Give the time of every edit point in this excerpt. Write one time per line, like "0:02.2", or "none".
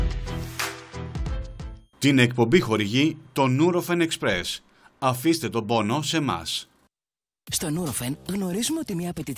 0:00.8
0:01.5